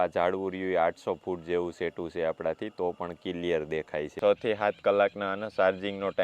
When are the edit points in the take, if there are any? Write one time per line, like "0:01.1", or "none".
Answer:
0:04.2